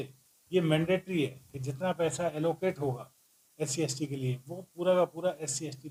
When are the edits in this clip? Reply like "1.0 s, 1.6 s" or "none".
none